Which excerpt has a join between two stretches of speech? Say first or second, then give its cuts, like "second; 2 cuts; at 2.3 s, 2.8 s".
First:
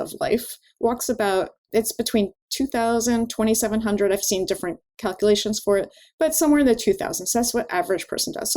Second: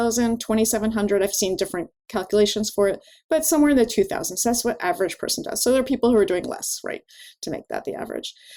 first; 1 cut; at 1.6 s